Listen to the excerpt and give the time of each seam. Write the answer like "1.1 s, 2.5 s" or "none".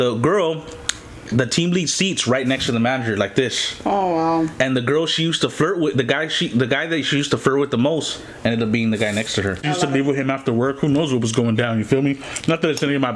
9.6 s